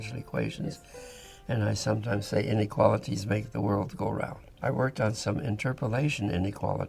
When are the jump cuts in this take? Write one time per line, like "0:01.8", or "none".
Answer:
0:04.4